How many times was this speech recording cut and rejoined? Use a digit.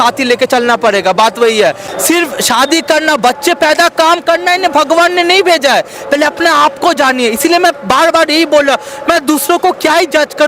1